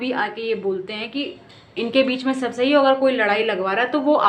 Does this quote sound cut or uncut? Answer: uncut